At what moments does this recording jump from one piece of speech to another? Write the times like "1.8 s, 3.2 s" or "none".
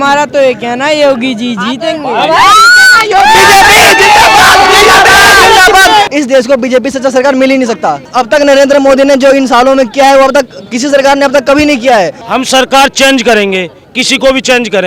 6.1 s, 8.1 s, 12.2 s